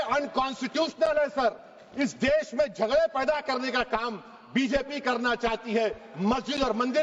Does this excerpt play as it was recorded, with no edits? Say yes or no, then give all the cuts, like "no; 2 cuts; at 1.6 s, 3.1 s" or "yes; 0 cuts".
yes; 0 cuts